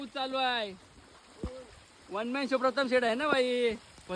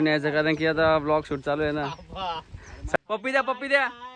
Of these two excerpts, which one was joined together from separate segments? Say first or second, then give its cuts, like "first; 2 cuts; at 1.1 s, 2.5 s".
second; 1 cut; at 2.8 s